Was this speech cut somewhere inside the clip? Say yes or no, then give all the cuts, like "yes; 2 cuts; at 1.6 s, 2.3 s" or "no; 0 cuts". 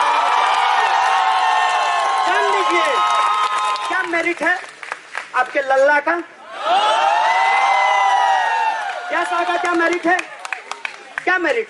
yes; 1 cut; at 3.9 s